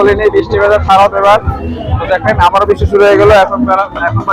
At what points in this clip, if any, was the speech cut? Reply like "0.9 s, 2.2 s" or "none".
none